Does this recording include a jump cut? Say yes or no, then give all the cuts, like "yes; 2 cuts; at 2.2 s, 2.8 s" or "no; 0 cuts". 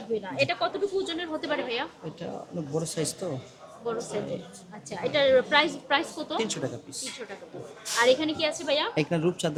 no; 0 cuts